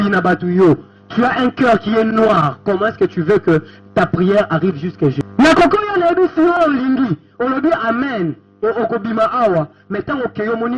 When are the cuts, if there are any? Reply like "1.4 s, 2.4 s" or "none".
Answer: 6.6 s